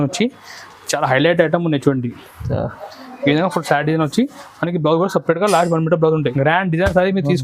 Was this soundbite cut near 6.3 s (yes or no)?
yes